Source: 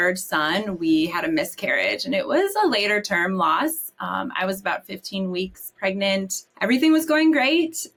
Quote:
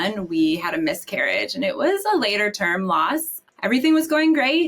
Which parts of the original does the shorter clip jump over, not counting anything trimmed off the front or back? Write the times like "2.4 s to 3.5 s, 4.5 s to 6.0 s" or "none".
3.9 s to 6.4 s